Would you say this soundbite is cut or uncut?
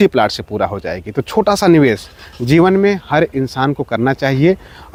uncut